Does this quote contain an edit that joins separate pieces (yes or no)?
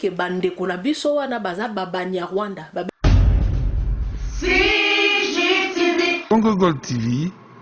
yes